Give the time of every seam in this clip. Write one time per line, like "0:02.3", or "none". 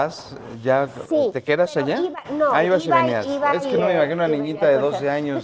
none

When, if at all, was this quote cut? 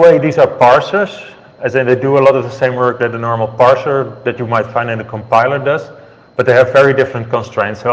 none

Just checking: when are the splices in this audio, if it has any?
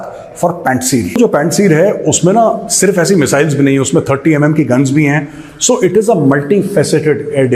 0:01.2

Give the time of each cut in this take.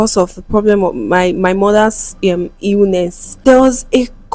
0:03.2

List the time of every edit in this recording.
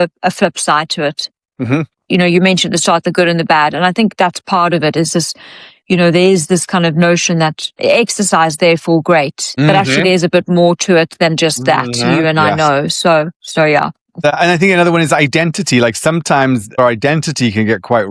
0:14.3
0:16.8

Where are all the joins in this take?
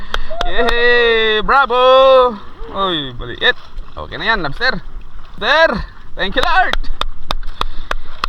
0:05.4

